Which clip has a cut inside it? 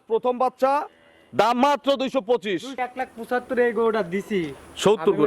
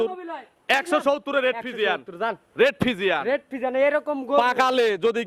first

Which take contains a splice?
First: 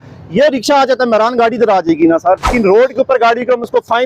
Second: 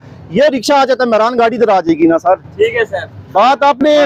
first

